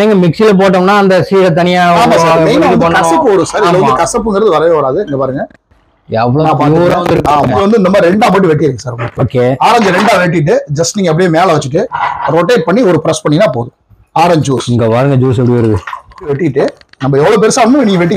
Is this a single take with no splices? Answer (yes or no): no